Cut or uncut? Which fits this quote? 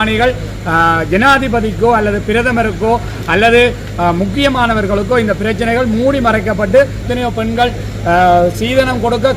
cut